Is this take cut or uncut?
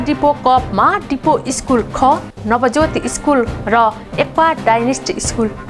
uncut